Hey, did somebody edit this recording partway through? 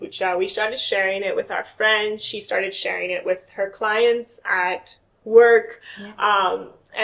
no; 0 cuts

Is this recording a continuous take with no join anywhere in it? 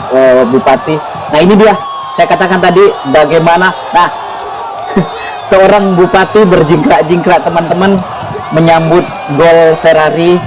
yes; 0 cuts

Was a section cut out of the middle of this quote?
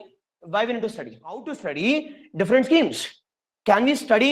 yes; 1 cut; at 1.6 s

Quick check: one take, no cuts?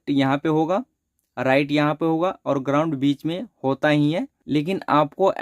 no; 1 cut; at 4.4 s

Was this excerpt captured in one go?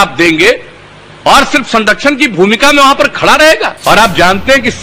no; 1 cut; at 3.7 s

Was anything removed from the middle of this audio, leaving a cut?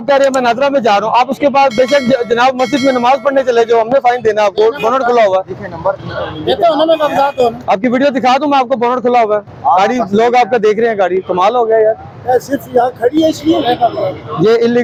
no; 0 cuts

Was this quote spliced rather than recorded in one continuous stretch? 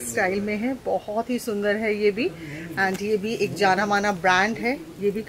no; 0 cuts

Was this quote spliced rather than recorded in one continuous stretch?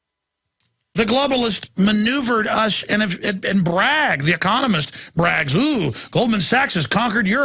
yes; 1 cut; at 4.1 s

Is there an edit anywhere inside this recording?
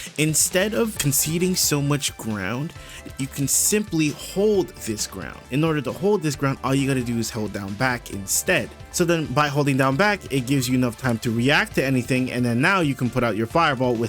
yes; 4 cuts; at 1.0 s, 3.0 s, 5.3 s, 8.8 s

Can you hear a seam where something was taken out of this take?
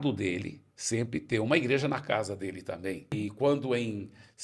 yes; 1 cut; at 3.1 s

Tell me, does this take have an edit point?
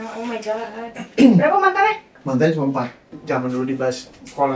yes; 1 cut; at 3.1 s

